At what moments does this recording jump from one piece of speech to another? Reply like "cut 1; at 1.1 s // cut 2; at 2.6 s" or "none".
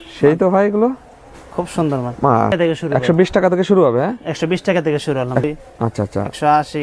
cut 1; at 2.5 s // cut 2; at 5.5 s